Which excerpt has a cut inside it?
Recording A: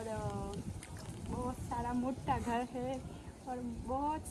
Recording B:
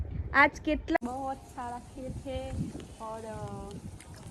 B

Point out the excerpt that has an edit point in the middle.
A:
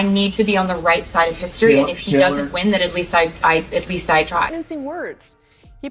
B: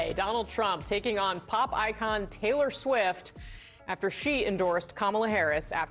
A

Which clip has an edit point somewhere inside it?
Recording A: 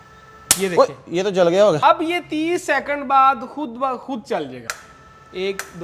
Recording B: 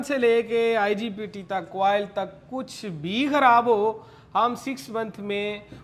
A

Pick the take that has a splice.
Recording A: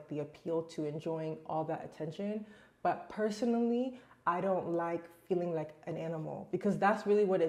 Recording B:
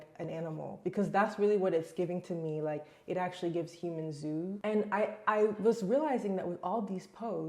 B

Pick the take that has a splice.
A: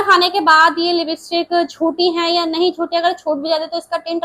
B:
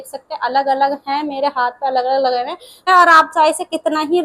B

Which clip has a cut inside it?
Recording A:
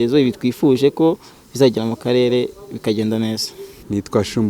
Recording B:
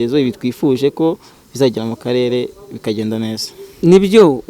B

